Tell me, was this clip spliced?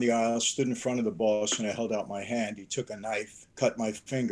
yes; 1 cut; at 3.4 s

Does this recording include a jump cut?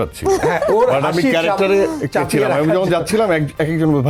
no; 0 cuts

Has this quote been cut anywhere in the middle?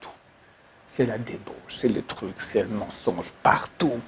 no; 0 cuts

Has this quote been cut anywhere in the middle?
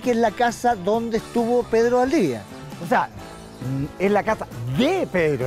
no; 0 cuts

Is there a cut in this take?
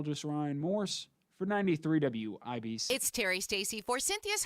yes; 1 cut; at 2.8 s

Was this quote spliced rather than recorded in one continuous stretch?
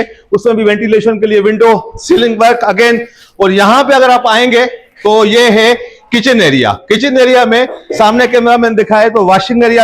no; 0 cuts

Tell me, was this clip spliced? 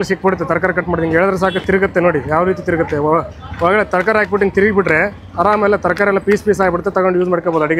no; 0 cuts

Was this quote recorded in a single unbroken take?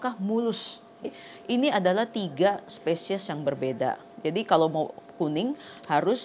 no; 1 cut; at 1.1 s

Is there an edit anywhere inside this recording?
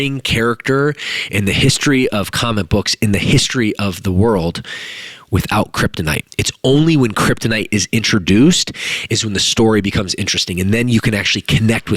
yes; 1 cut; at 6.3 s

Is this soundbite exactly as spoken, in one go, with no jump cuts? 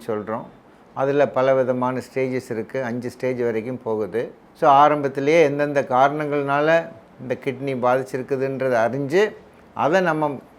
yes; 0 cuts

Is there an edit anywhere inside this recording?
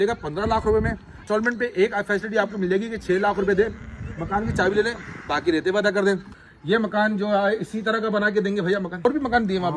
yes; 3 cuts; at 1.2 s, 6.4 s, 9.1 s

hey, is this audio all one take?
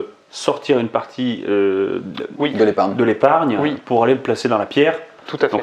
yes; 0 cuts

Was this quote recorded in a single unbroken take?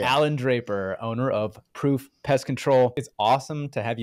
no; 1 cut; at 3.0 s

